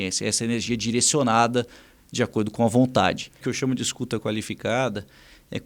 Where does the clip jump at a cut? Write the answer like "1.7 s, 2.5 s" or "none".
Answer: 3.4 s